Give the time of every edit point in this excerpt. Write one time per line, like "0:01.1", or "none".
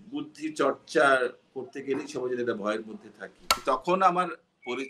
0:03.6